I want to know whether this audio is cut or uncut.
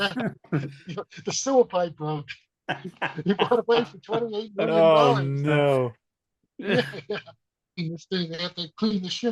cut